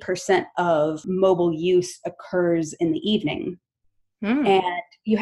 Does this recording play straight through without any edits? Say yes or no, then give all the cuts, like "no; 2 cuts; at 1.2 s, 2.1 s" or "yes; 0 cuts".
no; 1 cut; at 1.0 s